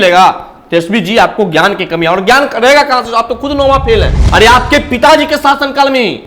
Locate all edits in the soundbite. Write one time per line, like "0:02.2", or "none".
0:04.2